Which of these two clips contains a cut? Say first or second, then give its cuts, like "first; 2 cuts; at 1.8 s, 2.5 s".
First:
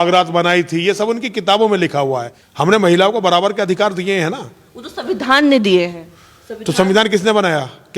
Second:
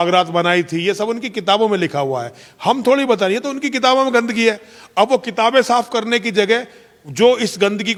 first; 1 cut; at 2.4 s